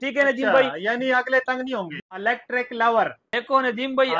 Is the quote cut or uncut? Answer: cut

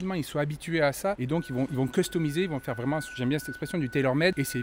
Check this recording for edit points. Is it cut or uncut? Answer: uncut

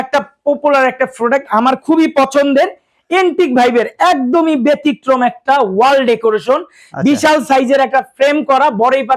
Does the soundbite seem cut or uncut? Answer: uncut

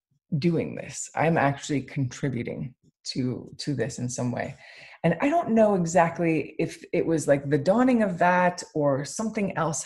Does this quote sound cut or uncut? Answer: uncut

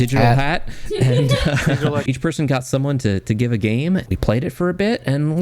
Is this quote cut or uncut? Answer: cut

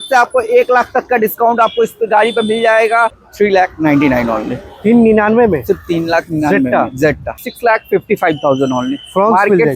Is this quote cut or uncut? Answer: cut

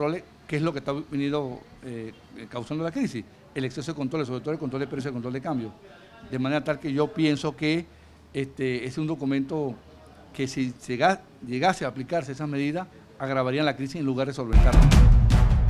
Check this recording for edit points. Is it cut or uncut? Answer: cut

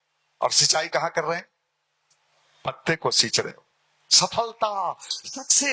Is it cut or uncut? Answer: uncut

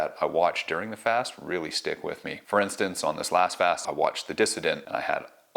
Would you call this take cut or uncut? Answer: cut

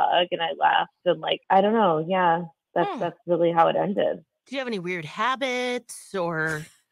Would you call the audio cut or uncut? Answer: cut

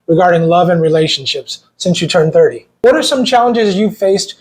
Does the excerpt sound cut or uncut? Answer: cut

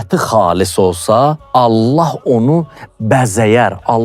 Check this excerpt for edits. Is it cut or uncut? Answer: cut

